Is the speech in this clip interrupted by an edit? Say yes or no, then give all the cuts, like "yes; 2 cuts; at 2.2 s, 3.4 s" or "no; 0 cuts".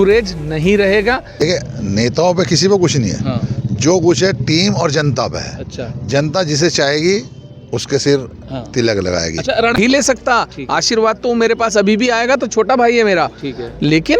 yes; 2 cuts; at 1.3 s, 9.8 s